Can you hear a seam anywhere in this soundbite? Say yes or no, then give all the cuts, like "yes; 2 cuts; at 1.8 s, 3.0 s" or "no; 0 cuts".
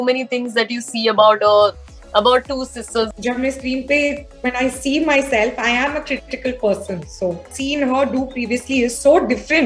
yes; 2 cuts; at 3.1 s, 7.5 s